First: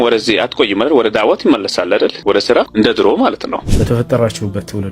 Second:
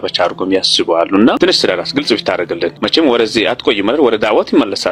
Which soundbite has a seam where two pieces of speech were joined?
first; 1 cut; at 3.7 s

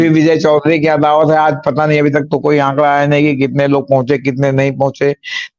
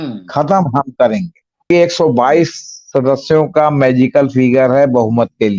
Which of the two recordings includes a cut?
second; 1 cut; at 1.6 s

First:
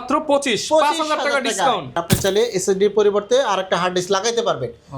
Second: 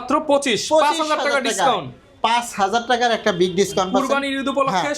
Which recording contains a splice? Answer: first; 1 cut; at 2.0 s

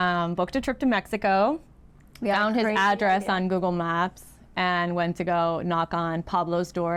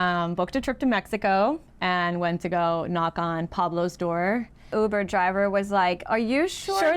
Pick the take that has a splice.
second; 2 cuts; at 1.7 s, 4.7 s

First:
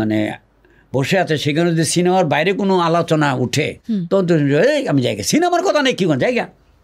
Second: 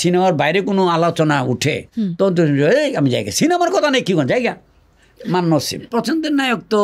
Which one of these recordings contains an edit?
second; 1 cut; at 5.9 s

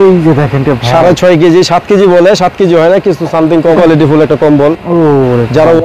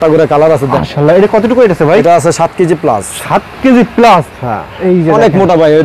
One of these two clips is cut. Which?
first; 1 cut; at 3.8 s

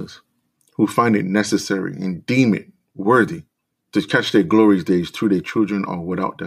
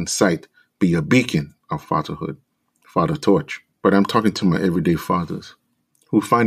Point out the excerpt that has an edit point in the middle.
second; 1 cut; at 3.6 s

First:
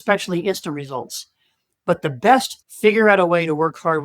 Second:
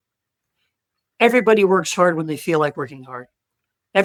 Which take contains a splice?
first; 1 cut; at 2.5 s

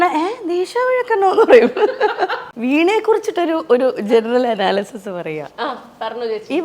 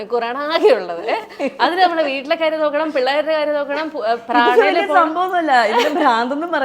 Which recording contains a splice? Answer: first; 1 cut; at 2.3 s

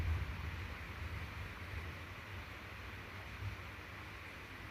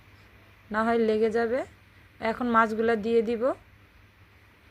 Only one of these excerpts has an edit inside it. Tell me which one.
second; 1 cut; at 2.4 s

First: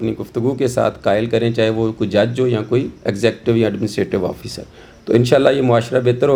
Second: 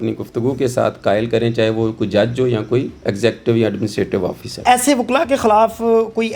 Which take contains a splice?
second; 1 cut; at 4.6 s

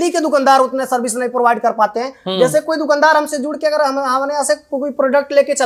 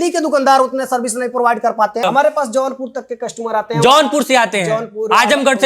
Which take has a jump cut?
second; 1 cut; at 2.0 s

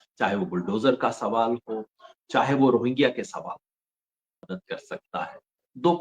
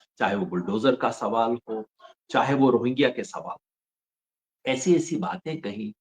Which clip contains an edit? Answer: first; 1 cut; at 4.5 s

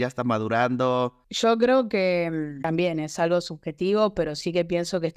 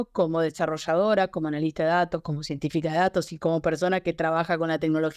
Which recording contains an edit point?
first; 2 cuts; at 1.2 s, 2.5 s

